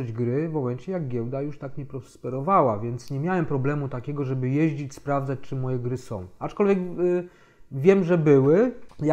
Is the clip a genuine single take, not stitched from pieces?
yes; 0 cuts

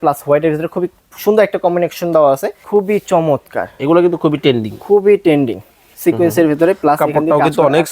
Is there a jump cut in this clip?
yes; 1 cut; at 2.6 s

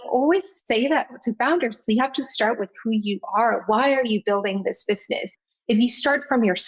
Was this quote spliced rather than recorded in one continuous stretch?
yes; 1 cut; at 5.3 s

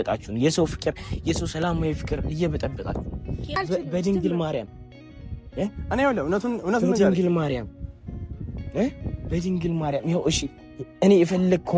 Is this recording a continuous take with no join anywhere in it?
no; 1 cut; at 3.5 s

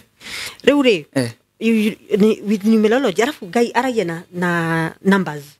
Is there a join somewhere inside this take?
no; 0 cuts

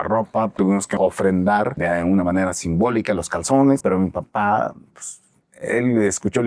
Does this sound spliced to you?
yes; 3 cuts; at 0.9 s, 1.8 s, 3.8 s

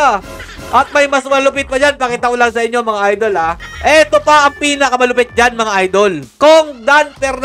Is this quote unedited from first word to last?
no; 2 cuts; at 3.6 s, 6.3 s

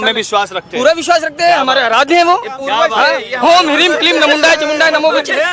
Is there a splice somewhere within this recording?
no; 0 cuts

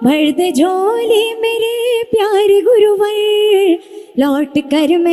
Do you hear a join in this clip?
no; 0 cuts

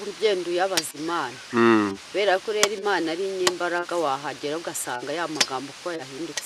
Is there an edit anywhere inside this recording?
no; 0 cuts

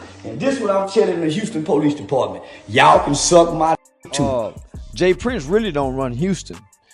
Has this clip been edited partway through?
yes; 1 cut; at 4.3 s

